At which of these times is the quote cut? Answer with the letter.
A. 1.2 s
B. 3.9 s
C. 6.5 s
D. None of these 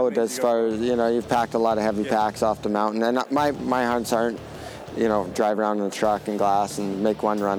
D